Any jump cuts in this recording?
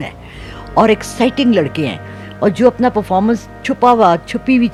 no; 0 cuts

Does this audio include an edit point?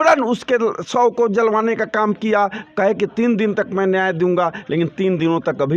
no; 0 cuts

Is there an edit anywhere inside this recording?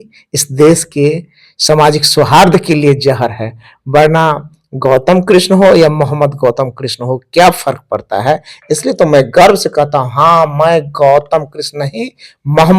no; 0 cuts

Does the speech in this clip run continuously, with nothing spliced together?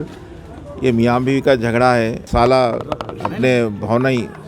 no; 2 cuts; at 2.3 s, 3.2 s

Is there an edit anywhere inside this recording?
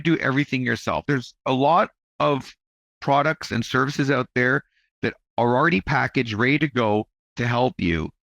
yes; 1 cut; at 1.0 s

